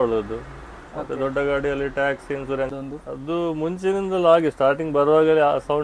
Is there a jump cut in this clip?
yes; 1 cut; at 2.7 s

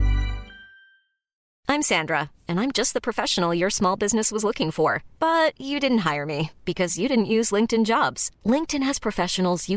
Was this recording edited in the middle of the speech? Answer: yes; 1 cut; at 1.5 s

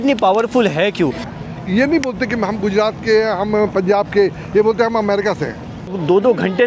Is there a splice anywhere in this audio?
yes; 2 cuts; at 1.2 s, 5.9 s

